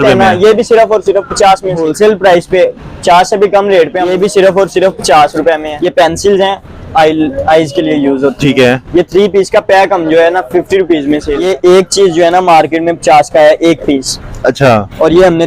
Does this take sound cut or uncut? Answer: cut